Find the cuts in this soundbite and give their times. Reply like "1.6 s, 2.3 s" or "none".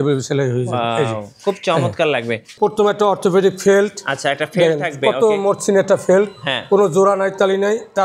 2.5 s